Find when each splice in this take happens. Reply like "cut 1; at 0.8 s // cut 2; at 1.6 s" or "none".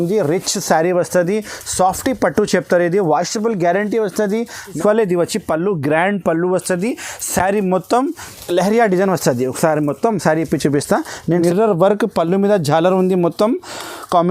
cut 1; at 4.8 s // cut 2; at 8.3 s // cut 3; at 11.3 s